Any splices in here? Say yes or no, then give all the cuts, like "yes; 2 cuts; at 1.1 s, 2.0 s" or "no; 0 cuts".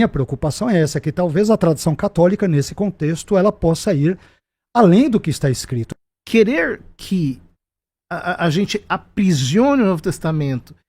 yes; 1 cut; at 5.8 s